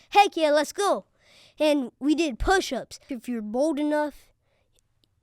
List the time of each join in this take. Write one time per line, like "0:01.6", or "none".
0:03.1